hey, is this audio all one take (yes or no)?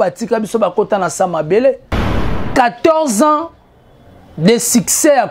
no